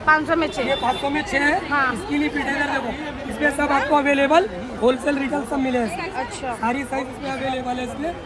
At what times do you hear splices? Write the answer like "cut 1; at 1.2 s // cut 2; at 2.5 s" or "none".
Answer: none